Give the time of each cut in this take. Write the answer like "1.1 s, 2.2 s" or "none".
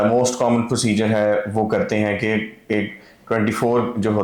none